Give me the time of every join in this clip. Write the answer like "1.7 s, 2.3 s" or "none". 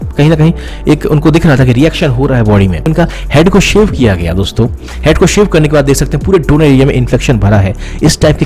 2.9 s